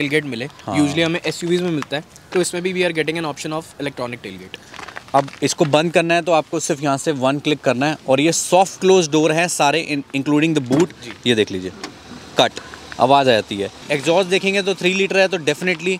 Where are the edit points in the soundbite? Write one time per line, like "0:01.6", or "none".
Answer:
none